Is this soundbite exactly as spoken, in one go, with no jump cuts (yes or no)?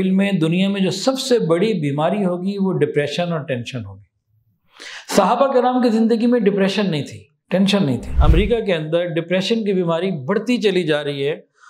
no